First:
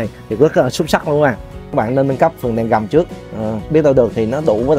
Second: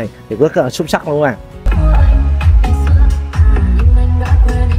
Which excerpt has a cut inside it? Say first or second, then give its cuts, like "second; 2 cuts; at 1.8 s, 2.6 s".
first; 1 cut; at 1.6 s